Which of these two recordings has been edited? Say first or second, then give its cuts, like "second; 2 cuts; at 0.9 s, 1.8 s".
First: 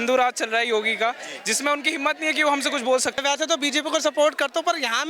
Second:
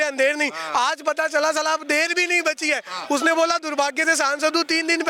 first; 1 cut; at 3.2 s